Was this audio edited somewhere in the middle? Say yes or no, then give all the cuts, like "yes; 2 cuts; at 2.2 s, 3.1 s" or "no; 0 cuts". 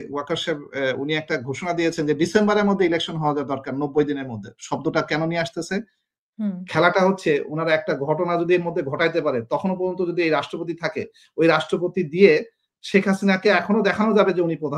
no; 0 cuts